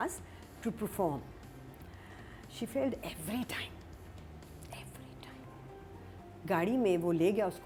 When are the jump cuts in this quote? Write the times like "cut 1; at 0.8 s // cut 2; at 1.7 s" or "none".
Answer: none